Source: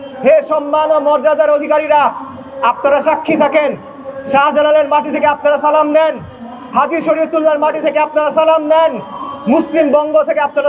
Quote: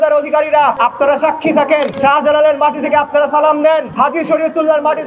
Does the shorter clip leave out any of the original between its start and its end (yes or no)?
yes